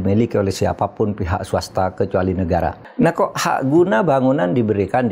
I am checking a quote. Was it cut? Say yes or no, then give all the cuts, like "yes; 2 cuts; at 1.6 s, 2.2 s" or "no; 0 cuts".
yes; 1 cut; at 2.8 s